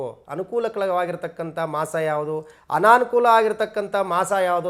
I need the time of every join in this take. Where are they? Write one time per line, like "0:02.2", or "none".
none